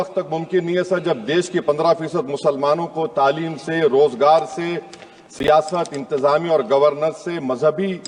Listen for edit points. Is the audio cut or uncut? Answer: uncut